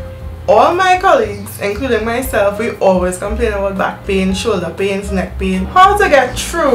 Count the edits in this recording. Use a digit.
1